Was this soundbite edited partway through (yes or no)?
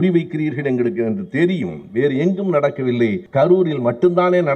yes